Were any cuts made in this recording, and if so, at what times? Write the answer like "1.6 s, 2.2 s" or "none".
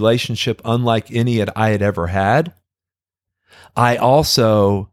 none